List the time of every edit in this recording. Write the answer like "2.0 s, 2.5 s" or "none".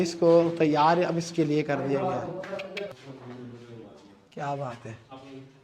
2.9 s